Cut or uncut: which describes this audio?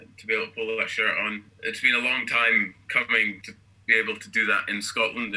cut